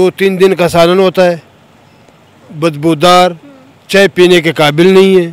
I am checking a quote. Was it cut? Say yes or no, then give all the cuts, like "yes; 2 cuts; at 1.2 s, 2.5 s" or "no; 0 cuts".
no; 0 cuts